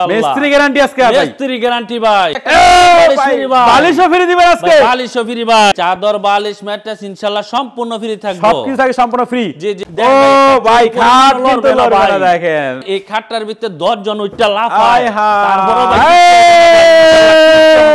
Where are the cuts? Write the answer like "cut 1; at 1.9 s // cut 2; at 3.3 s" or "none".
cut 1; at 2.3 s // cut 2; at 5.7 s // cut 3; at 9.8 s // cut 4; at 12.8 s